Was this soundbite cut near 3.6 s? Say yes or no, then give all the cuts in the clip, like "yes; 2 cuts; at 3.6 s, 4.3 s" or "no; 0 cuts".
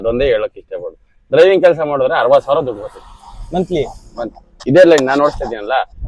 no; 0 cuts